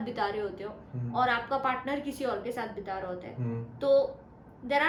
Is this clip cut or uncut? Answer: uncut